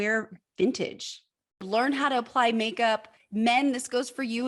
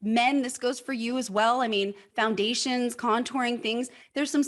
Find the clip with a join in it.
first; 1 cut; at 1.6 s

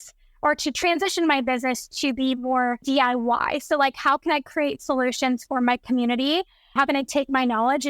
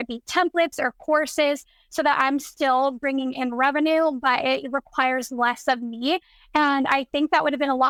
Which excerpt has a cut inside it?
first; 2 cuts; at 2.8 s, 6.7 s

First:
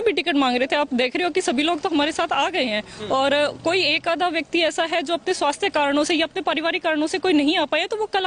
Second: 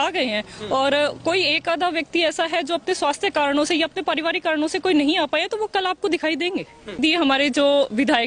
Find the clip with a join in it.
second; 1 cut; at 7.0 s

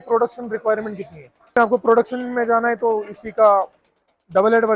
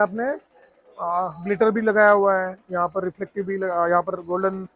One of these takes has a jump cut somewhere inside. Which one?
first; 1 cut; at 1.5 s

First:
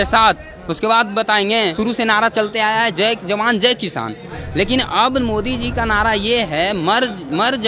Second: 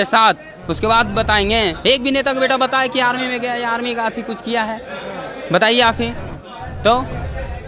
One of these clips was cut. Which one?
first; 1 cut; at 1.8 s

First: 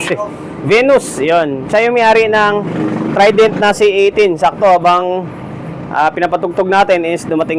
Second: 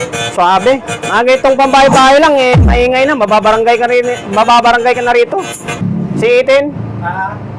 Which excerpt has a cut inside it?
second; 1 cut; at 5.8 s

